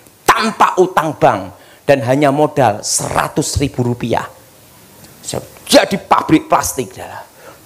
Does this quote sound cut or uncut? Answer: uncut